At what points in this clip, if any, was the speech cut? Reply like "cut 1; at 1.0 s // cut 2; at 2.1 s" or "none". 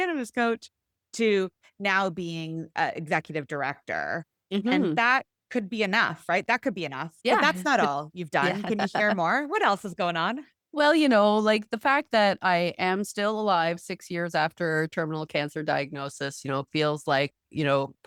none

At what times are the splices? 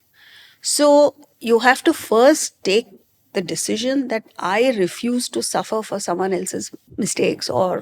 cut 1; at 6.8 s

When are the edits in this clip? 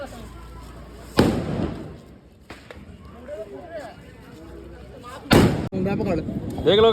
cut 1; at 5.7 s

